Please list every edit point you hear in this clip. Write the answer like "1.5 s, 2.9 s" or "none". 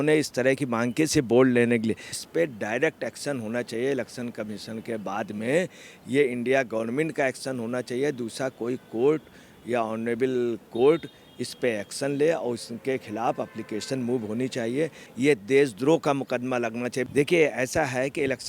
2.1 s

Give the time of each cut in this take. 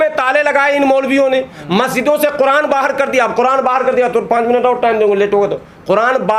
none

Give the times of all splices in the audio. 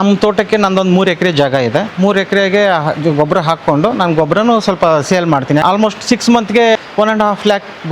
5.6 s, 6.8 s

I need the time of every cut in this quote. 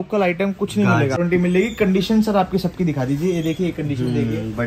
1.2 s

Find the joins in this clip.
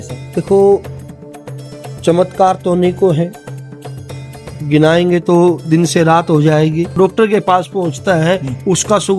6.9 s

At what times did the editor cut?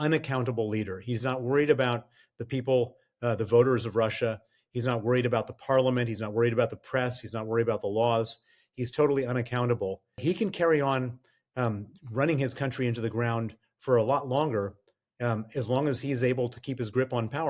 10.2 s

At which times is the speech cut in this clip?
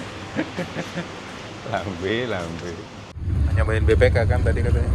1.3 s, 3.2 s

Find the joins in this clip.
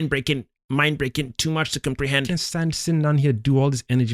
2.3 s

